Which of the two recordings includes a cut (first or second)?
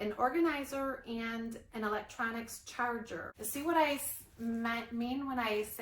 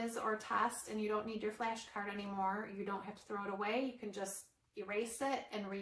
first